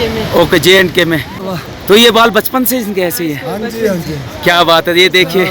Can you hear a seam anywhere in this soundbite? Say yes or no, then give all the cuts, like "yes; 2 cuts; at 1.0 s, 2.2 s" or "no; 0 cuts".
yes; 1 cut; at 1.4 s